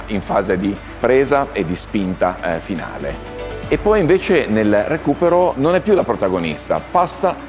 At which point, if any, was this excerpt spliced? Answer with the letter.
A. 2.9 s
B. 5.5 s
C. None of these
B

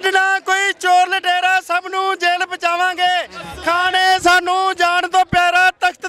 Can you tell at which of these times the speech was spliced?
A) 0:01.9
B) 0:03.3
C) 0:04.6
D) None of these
D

